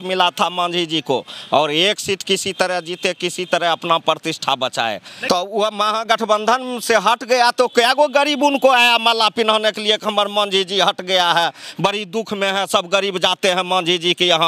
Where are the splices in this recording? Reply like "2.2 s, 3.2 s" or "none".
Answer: 5.1 s